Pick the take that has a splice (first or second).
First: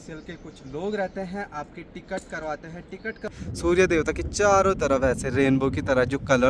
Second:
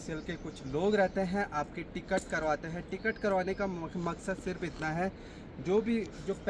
first